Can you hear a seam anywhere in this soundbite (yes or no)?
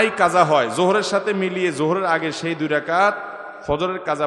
no